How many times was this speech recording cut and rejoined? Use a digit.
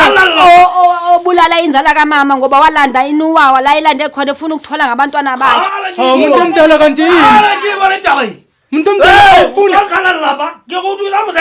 0